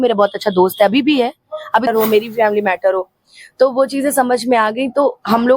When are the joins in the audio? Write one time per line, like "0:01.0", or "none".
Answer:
0:01.9